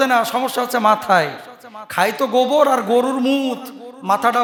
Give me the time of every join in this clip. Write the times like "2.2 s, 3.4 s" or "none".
none